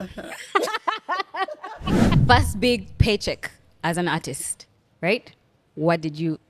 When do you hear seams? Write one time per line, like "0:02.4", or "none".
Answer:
0:02.2